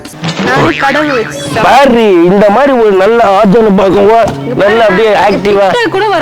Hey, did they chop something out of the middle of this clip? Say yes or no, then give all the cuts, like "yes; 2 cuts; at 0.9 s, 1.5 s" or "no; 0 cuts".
no; 0 cuts